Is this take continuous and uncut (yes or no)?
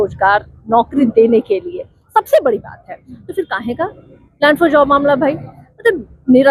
yes